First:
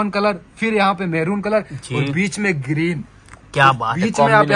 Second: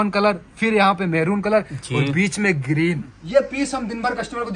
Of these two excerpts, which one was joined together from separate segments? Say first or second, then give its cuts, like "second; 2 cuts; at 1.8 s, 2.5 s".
second; 1 cut; at 3.2 s